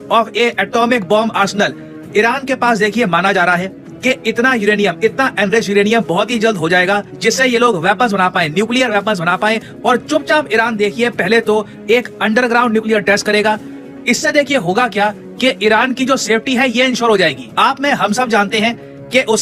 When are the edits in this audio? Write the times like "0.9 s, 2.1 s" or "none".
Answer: none